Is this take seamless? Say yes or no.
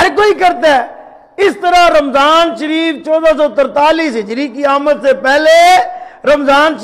yes